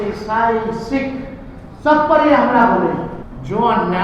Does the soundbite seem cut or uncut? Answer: cut